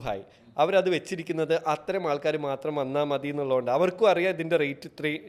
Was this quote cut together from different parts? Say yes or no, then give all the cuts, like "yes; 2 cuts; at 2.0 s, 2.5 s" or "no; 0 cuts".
no; 0 cuts